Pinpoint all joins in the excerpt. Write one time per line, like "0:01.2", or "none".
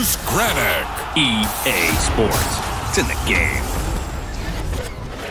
none